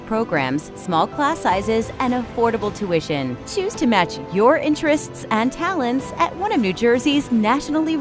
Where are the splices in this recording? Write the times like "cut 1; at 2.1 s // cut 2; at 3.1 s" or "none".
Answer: none